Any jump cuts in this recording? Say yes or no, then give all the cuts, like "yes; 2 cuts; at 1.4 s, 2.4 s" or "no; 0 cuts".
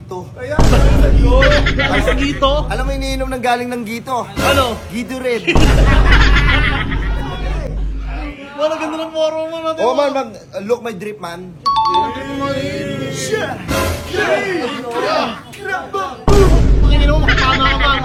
no; 0 cuts